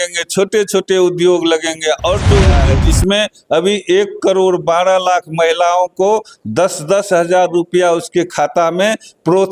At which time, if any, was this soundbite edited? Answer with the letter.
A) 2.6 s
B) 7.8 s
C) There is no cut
A